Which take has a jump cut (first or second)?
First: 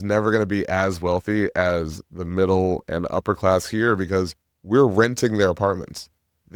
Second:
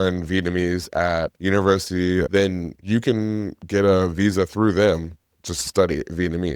second